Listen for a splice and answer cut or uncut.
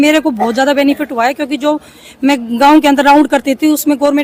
uncut